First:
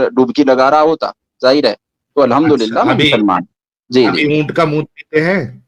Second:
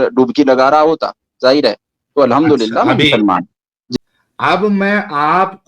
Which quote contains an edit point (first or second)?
second